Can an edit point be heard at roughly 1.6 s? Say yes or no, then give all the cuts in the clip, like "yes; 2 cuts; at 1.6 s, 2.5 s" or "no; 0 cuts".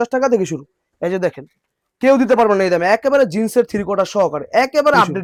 no; 0 cuts